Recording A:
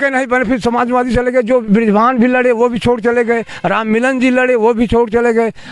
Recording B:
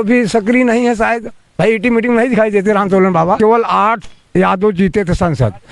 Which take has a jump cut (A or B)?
B